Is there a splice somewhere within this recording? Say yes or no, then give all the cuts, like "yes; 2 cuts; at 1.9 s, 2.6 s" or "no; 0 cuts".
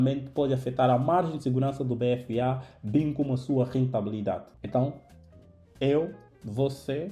yes; 1 cut; at 4.5 s